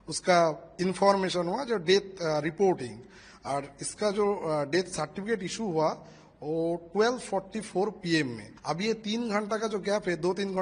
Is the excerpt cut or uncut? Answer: cut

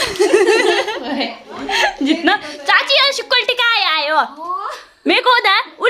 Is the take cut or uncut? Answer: uncut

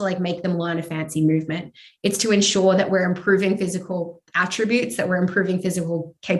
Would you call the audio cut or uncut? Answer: uncut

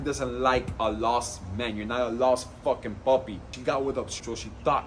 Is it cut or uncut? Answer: cut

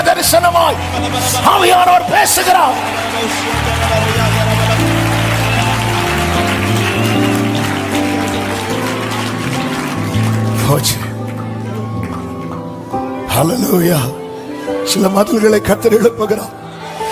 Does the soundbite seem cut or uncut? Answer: uncut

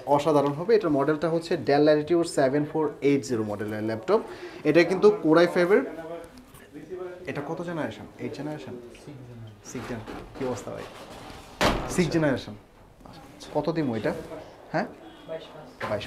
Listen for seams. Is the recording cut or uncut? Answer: uncut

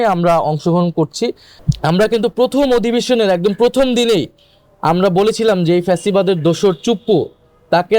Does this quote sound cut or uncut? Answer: cut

